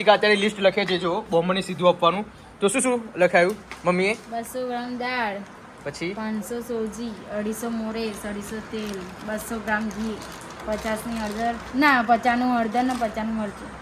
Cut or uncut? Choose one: uncut